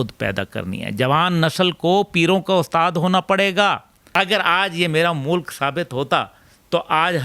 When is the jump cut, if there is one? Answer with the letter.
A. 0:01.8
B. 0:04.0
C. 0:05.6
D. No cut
B